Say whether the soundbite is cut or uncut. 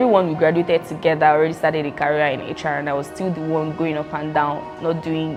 uncut